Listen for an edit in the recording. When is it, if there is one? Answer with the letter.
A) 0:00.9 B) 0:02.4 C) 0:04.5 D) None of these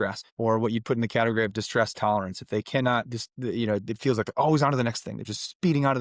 D